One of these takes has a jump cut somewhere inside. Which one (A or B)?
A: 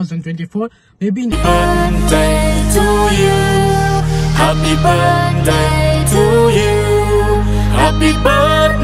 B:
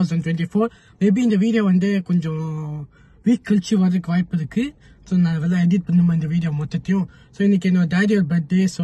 A